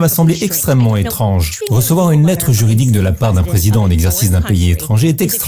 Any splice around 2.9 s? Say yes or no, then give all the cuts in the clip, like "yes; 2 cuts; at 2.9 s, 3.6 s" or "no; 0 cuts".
no; 1 cut; at 1.5 s